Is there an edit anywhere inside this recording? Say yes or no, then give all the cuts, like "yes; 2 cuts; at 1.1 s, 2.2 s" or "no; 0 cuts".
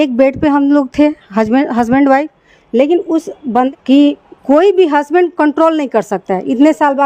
yes; 1 cut; at 3.7 s